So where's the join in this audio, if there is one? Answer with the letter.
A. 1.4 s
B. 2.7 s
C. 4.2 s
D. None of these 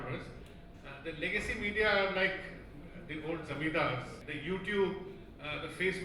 C